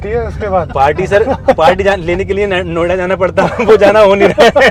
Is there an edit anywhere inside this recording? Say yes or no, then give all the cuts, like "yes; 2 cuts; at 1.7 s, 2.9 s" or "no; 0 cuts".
no; 0 cuts